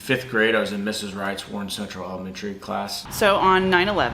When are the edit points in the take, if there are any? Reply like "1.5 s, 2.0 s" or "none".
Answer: 3.0 s